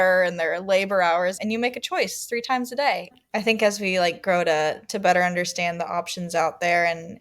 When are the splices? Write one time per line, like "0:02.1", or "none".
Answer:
0:03.1